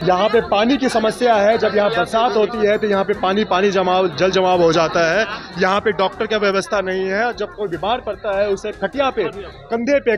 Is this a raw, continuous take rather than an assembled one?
yes; 0 cuts

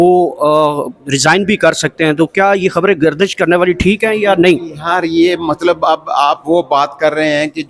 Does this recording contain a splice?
no; 0 cuts

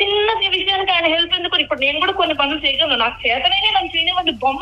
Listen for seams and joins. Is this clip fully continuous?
yes; 0 cuts

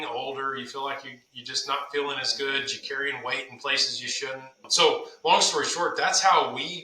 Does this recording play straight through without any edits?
no; 1 cut; at 4.7 s

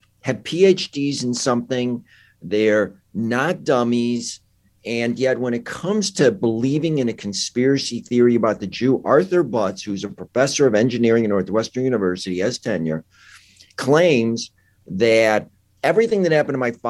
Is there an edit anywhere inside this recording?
no; 0 cuts

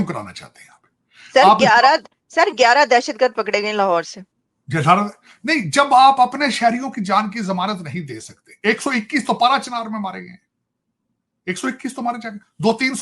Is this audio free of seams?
yes; 0 cuts

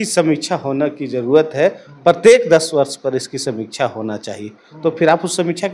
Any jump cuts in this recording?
no; 0 cuts

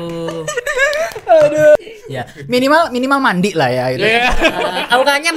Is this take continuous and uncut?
no; 1 cut; at 1.8 s

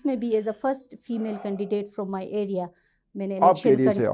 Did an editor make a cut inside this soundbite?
no; 0 cuts

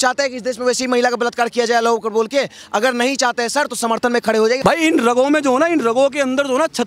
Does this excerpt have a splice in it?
yes; 1 cut; at 4.6 s

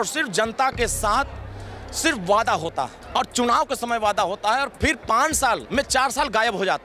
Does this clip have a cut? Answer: yes; 2 cuts; at 3.0 s, 5.7 s

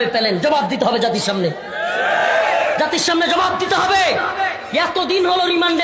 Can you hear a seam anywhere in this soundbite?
no; 0 cuts

